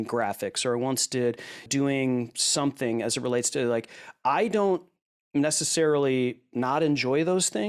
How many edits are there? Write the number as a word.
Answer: one